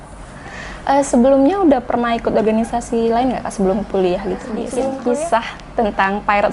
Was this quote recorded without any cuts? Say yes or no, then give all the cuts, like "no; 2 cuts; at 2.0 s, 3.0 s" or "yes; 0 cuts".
no; 1 cut; at 4.9 s